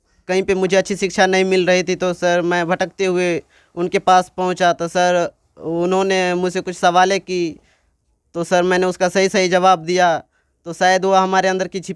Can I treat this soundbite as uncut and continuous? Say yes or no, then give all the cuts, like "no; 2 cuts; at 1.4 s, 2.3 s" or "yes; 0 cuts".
yes; 0 cuts